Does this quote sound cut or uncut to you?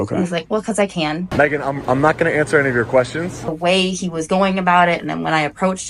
cut